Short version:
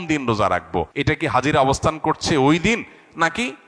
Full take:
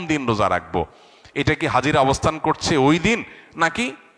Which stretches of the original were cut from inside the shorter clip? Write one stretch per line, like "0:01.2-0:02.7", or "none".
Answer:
0:00.9-0:01.3